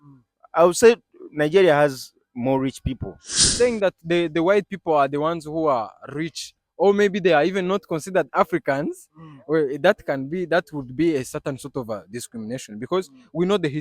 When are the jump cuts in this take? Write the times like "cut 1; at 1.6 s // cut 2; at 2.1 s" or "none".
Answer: cut 1; at 3.4 s